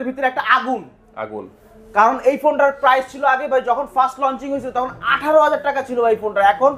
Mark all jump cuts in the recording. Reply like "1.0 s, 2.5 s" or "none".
none